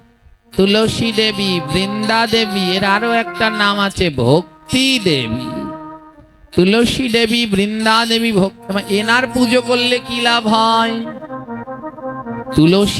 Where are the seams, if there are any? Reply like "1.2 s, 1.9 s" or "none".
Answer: none